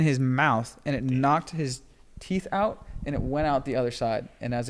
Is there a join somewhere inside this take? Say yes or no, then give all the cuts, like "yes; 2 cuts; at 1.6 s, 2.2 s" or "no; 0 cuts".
no; 0 cuts